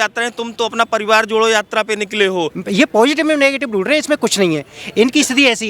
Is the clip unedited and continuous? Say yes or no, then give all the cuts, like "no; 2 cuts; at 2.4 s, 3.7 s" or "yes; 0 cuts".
no; 1 cut; at 2.6 s